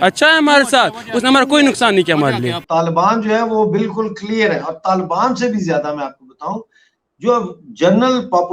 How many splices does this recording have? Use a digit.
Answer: 1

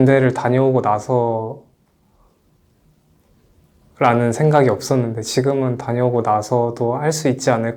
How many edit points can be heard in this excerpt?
0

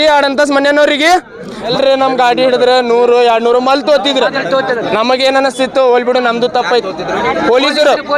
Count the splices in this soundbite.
1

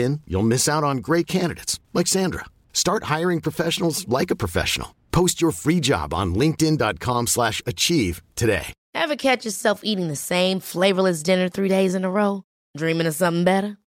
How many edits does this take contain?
1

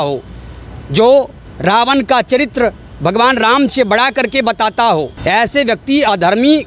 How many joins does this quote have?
2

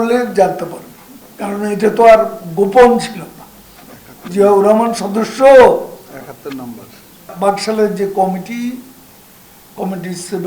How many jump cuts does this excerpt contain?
1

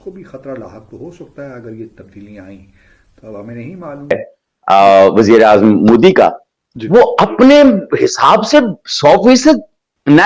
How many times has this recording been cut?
1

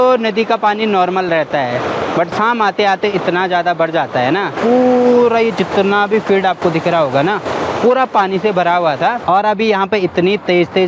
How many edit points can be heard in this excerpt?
2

